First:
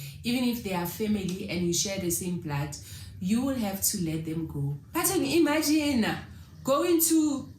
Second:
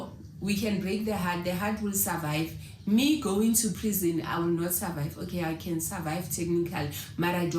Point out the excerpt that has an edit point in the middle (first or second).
first